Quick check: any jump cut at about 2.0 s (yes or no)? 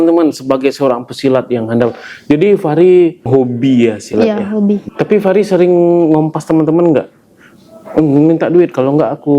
no